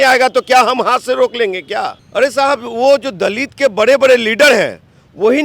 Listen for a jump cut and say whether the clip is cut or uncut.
cut